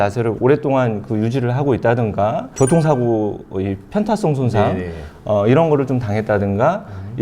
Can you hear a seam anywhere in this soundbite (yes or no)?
no